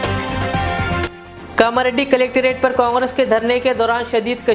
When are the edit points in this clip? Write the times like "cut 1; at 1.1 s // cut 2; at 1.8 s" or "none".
cut 1; at 1.1 s